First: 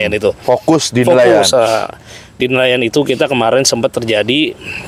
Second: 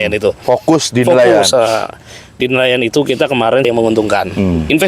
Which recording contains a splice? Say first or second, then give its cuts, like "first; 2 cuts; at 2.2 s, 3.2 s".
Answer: second; 1 cut; at 3.7 s